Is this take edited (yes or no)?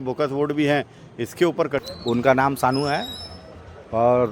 yes